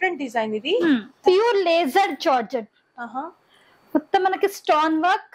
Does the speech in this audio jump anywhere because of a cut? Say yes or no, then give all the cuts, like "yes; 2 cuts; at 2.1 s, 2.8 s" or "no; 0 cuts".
yes; 1 cut; at 1.1 s